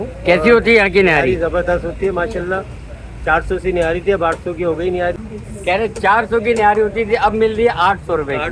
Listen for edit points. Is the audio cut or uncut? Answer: cut